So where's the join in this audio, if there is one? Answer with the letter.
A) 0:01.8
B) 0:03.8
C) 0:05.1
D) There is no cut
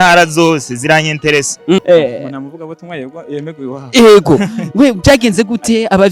A